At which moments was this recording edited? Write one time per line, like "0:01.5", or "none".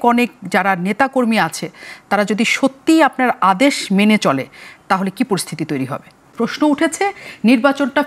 0:06.3